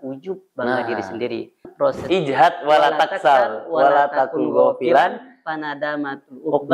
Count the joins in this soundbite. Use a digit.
1